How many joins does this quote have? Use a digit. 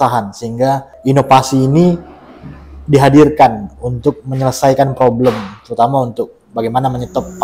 1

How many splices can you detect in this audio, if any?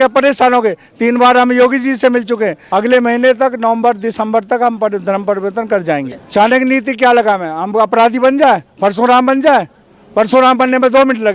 2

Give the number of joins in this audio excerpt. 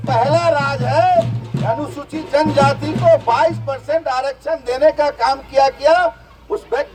0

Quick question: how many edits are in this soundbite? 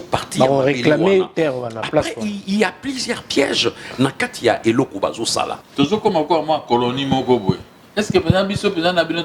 2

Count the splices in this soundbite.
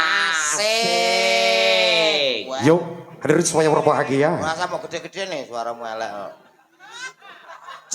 1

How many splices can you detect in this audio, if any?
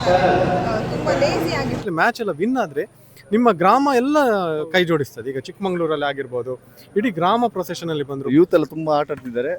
2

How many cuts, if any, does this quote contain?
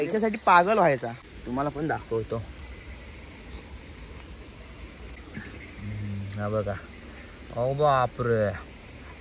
2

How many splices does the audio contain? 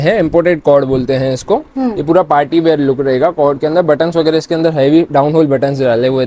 0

